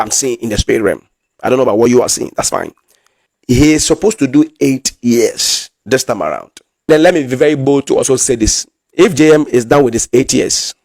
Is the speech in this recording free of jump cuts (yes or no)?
no